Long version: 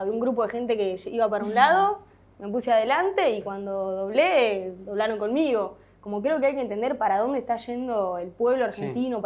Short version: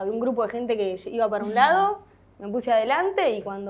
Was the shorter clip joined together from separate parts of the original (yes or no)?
no